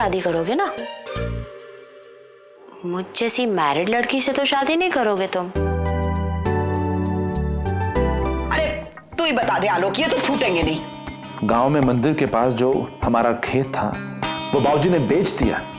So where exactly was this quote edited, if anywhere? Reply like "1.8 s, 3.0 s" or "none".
8.5 s